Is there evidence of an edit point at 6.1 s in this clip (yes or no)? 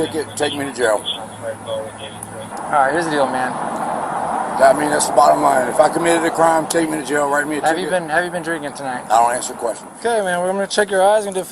no